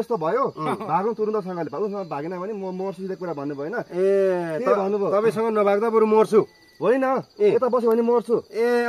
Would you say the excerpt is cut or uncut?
uncut